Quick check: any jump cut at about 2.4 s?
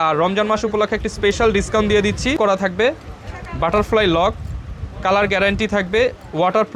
yes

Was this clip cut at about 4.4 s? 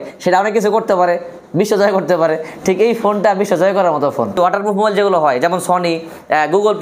yes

